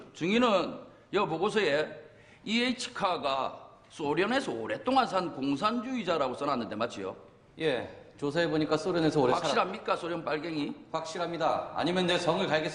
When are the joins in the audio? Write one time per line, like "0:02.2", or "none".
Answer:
0:07.4